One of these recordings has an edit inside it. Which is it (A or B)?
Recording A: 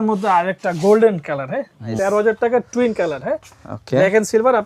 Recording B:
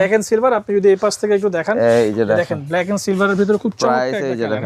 A